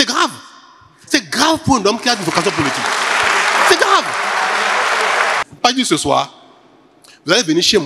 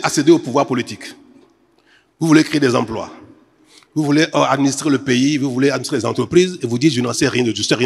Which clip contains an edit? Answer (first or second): first